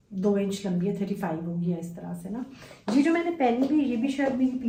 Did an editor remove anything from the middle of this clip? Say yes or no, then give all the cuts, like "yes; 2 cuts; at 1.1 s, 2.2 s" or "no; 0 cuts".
no; 0 cuts